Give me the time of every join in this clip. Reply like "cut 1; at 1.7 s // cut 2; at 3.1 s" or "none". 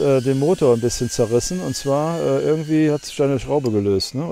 none